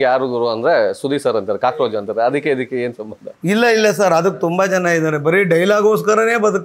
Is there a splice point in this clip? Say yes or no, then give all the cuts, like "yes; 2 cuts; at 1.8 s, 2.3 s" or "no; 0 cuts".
no; 0 cuts